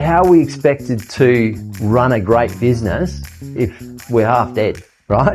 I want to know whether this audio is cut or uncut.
uncut